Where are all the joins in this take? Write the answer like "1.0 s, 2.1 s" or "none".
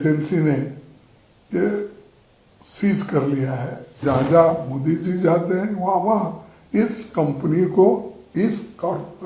4.0 s